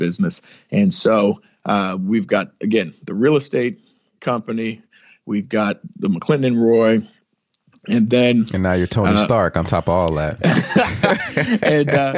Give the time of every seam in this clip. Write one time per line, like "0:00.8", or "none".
none